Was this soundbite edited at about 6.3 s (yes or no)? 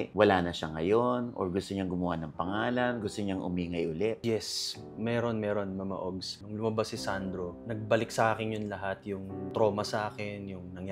yes